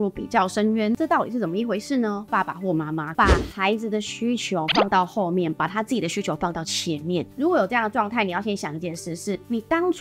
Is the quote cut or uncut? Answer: cut